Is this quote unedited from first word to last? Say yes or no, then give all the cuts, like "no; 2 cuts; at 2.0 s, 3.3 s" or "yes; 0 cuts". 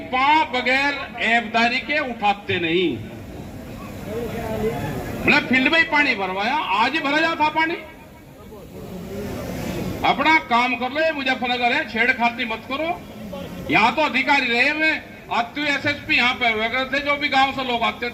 yes; 0 cuts